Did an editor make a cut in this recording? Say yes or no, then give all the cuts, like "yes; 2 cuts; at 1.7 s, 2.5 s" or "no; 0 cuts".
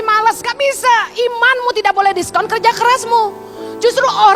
no; 0 cuts